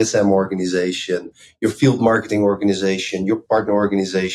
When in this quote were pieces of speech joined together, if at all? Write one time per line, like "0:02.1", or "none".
0:01.4
0:03.4